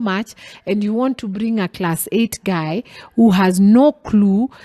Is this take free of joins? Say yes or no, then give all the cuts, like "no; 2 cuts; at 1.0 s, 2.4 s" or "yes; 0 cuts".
yes; 0 cuts